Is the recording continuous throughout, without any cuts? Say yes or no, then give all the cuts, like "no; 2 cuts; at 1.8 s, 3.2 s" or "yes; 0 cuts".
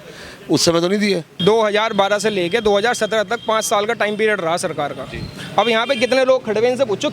no; 1 cut; at 1.4 s